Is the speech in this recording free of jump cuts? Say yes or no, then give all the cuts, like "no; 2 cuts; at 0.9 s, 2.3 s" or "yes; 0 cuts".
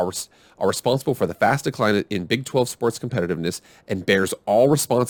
yes; 0 cuts